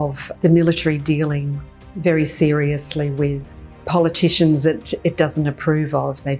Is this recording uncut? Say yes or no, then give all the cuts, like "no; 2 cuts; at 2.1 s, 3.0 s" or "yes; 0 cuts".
yes; 0 cuts